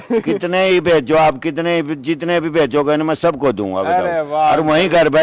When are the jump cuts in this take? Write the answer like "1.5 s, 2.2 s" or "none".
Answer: none